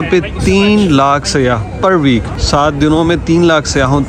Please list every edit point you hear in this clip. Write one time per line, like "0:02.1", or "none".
0:02.4